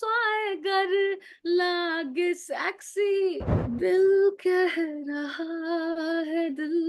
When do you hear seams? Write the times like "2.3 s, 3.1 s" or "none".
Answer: 3.5 s